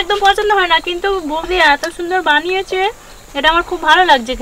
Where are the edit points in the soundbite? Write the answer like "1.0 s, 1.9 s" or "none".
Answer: none